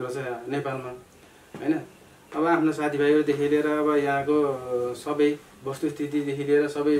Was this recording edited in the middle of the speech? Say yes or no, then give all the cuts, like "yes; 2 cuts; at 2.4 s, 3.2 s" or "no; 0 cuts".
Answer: no; 0 cuts